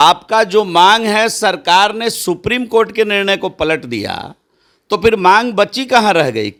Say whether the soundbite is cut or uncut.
uncut